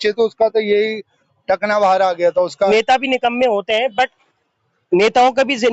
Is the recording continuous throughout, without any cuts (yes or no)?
no